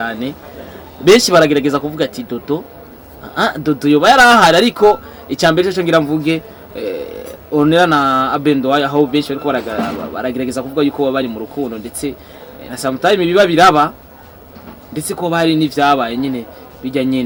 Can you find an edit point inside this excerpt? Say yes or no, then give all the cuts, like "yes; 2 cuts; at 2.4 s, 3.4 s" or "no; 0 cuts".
no; 0 cuts